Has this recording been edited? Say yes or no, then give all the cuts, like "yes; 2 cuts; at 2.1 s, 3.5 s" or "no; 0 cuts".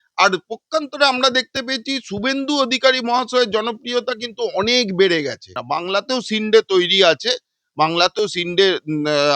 yes; 1 cut; at 5.6 s